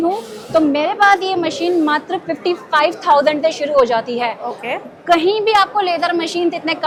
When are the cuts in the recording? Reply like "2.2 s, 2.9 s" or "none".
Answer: none

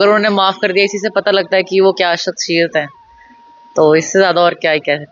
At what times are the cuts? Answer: none

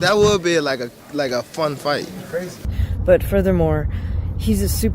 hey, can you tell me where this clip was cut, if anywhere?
2.7 s

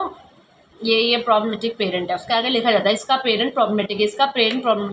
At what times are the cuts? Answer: none

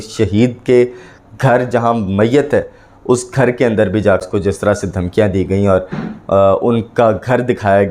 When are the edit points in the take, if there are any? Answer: 4.2 s

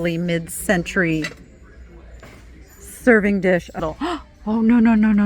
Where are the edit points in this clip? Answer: 3.7 s

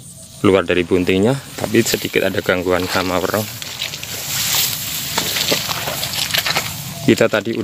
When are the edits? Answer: none

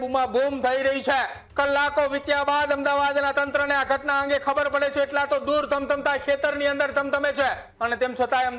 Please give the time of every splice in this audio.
1.4 s, 7.7 s

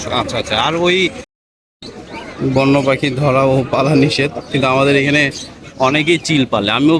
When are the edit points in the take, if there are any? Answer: 1.3 s

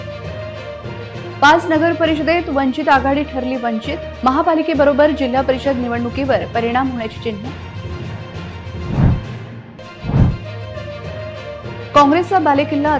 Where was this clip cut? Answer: 1.0 s

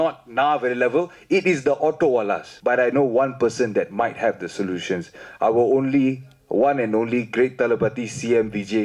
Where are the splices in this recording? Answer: 2.5 s

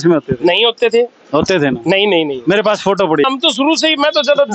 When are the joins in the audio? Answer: 3.2 s

